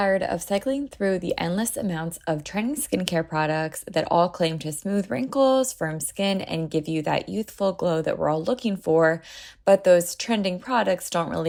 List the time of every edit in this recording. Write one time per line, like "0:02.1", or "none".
none